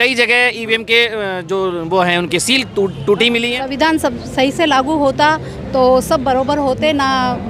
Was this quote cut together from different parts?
yes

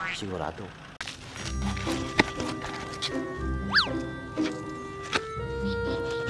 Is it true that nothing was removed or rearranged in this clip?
no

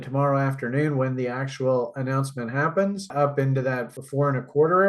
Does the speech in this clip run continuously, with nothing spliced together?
no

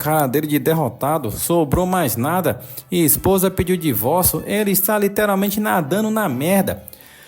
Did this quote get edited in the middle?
no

